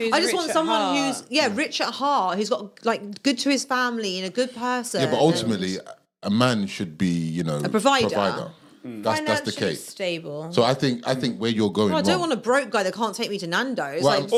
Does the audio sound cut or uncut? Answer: uncut